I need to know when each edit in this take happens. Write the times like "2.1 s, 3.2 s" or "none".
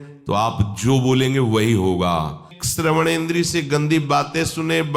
2.6 s